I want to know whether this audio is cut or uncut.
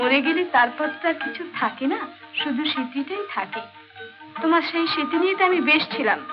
uncut